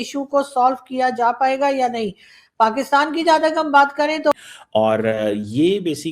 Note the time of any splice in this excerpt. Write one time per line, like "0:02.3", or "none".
0:04.3